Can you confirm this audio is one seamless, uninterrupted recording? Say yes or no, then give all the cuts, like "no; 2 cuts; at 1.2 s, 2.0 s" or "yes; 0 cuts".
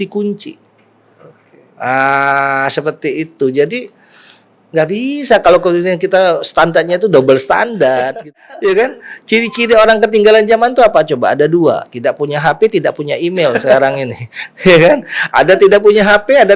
no; 1 cut; at 8.2 s